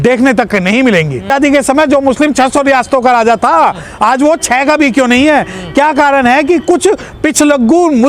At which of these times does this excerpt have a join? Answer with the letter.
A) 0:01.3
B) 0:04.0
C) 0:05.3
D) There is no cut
A